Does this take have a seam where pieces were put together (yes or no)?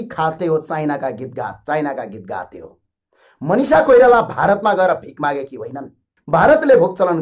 yes